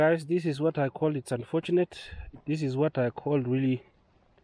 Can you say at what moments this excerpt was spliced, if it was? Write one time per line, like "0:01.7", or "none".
none